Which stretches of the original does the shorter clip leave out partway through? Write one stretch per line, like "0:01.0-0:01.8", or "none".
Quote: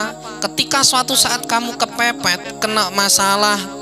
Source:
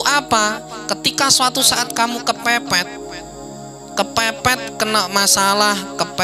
0:03.0-0:04.7